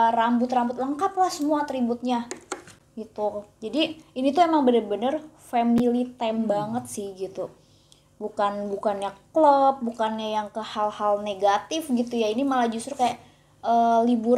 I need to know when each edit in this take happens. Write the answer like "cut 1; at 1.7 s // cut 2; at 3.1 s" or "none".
none